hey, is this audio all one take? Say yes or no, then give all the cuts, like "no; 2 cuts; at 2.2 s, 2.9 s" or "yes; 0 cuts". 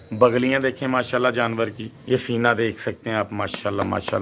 no; 1 cut; at 1.9 s